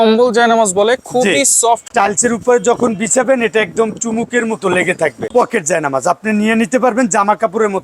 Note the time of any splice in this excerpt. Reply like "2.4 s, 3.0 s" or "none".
1.9 s, 5.2 s